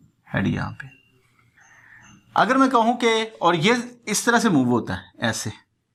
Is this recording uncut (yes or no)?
yes